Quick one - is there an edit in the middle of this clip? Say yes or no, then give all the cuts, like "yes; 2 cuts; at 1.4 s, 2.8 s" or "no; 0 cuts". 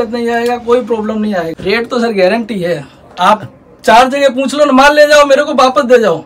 yes; 1 cut; at 1.6 s